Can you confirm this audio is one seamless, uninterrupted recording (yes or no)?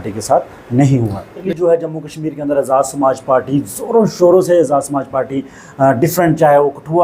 no